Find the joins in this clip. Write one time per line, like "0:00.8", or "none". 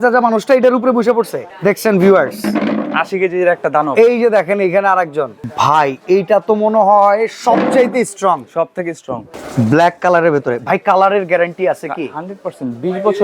0:01.4
0:05.4
0:09.3